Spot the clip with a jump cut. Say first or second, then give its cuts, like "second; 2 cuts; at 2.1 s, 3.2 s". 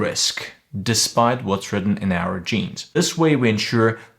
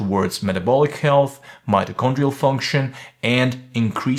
first; 1 cut; at 3.0 s